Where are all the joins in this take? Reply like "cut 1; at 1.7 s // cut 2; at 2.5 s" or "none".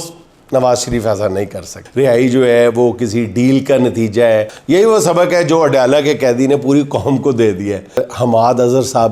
cut 1; at 1.8 s // cut 2; at 4.6 s // cut 3; at 8.1 s